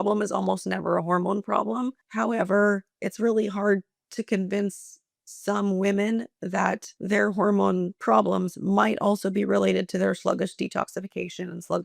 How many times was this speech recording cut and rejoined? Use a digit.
3